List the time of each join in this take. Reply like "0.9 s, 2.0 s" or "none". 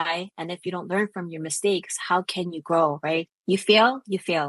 3.3 s

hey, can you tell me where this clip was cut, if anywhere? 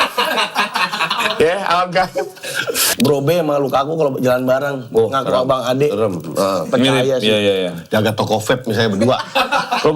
2.9 s

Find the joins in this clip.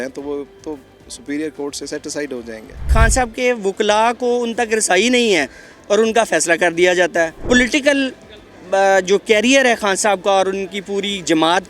2.9 s, 7.4 s

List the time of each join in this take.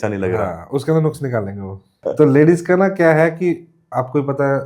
2.0 s

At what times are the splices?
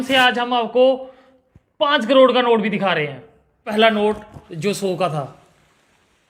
3.7 s

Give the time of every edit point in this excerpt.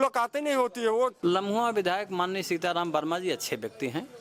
1.2 s

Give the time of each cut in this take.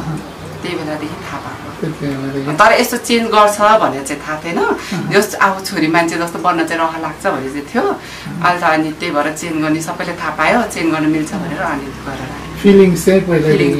none

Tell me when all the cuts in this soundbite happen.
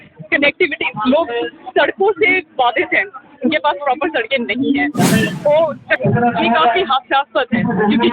5.9 s

